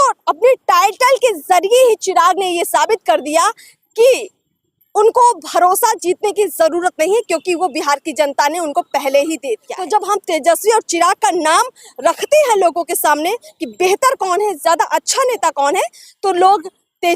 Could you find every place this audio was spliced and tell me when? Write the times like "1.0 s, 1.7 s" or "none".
9.7 s